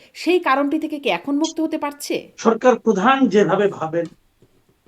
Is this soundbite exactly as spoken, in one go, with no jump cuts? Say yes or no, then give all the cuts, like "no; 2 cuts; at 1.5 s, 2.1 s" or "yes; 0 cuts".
no; 1 cut; at 2.3 s